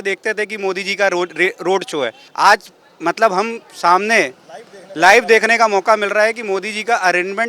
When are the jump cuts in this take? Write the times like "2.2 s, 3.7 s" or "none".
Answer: 2.2 s